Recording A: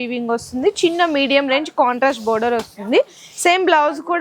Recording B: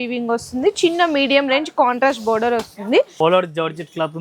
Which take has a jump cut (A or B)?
B